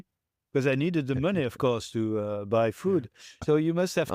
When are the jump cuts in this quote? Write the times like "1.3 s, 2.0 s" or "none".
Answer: 3.2 s